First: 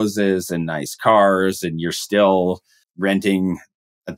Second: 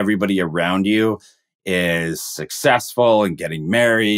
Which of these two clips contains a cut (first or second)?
first